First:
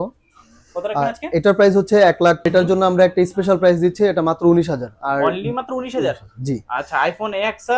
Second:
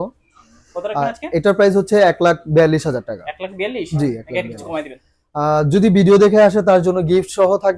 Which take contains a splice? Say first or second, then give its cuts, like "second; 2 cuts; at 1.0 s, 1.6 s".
first; 1 cut; at 2.5 s